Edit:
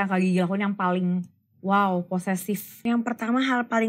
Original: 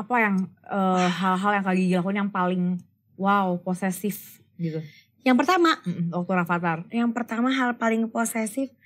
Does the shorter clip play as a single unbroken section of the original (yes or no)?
no